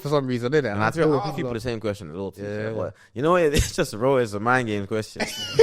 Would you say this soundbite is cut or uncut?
uncut